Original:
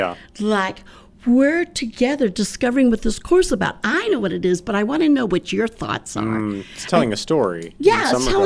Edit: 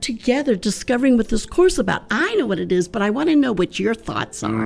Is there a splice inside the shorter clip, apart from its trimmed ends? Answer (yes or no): no